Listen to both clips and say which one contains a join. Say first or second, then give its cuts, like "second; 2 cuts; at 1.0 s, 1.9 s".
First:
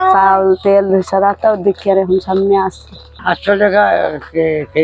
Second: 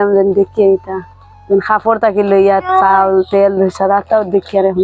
first; 1 cut; at 3.1 s